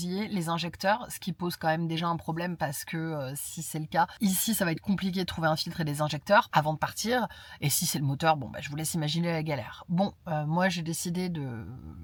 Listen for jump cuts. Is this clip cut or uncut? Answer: uncut